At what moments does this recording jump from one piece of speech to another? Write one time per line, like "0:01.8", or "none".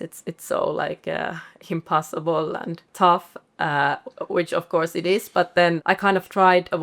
0:02.9
0:05.8